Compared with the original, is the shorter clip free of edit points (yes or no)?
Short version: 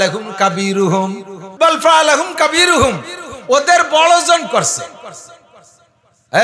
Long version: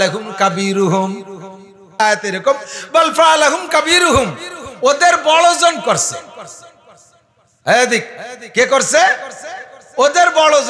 no